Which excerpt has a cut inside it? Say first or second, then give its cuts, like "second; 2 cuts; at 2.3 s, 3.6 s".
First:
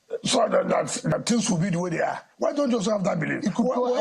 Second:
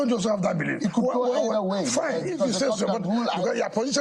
first; 1 cut; at 1.1 s